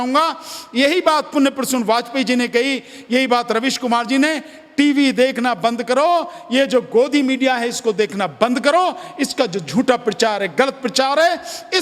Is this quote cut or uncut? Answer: uncut